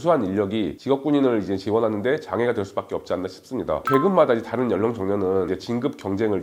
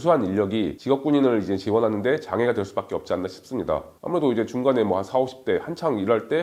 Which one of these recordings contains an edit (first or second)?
first